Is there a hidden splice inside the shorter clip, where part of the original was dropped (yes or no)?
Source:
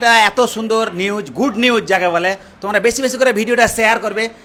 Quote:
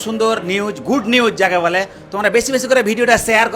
no